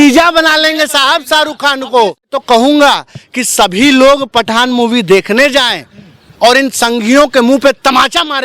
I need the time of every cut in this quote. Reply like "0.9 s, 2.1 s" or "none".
2.4 s